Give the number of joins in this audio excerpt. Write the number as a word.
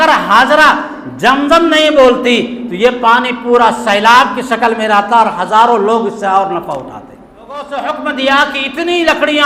one